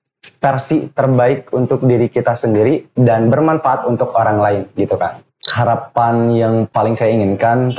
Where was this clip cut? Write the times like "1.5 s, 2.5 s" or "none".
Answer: 5.4 s, 6.7 s